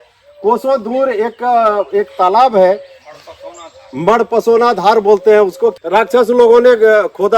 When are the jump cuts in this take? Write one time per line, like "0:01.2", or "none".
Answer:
0:05.8